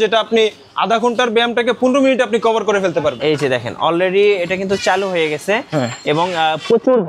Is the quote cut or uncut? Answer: cut